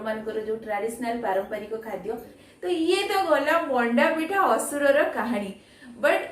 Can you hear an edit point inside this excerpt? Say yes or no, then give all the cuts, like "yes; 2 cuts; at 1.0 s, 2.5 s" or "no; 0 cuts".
yes; 1 cut; at 2.3 s